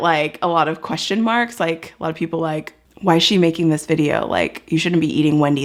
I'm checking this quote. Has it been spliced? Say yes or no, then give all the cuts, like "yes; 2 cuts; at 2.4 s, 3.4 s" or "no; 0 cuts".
no; 0 cuts